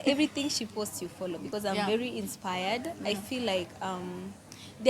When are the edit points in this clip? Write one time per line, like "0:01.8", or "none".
0:01.4